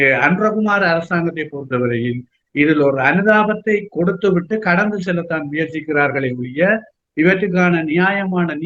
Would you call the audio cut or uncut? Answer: uncut